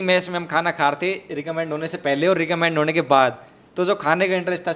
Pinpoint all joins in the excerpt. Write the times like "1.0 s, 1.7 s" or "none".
none